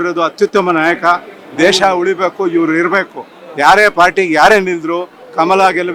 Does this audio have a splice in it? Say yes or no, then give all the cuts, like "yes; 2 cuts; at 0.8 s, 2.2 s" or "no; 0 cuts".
no; 0 cuts